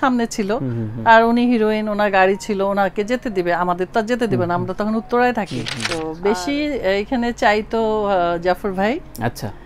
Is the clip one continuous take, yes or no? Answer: no